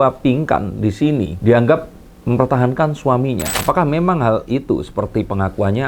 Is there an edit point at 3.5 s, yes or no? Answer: yes